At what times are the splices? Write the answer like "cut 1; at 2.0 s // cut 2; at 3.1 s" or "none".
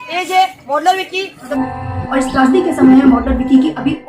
cut 1; at 1.5 s